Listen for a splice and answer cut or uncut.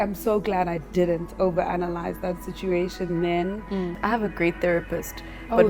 cut